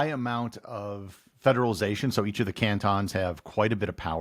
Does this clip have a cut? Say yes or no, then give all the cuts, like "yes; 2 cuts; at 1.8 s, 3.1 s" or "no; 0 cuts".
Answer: no; 0 cuts